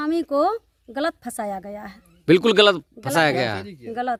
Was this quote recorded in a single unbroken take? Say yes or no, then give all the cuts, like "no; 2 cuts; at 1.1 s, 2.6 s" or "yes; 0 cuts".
yes; 0 cuts